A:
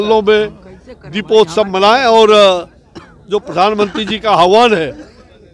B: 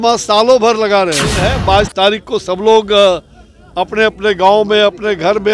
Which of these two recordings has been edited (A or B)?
B